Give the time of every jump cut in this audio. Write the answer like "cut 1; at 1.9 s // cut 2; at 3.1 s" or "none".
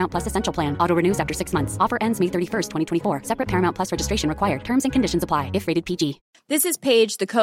cut 1; at 6.3 s